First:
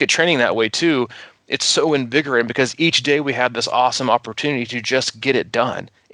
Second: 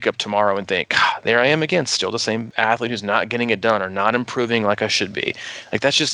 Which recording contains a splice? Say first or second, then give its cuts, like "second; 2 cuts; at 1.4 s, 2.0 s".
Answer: second; 1 cut; at 2.5 s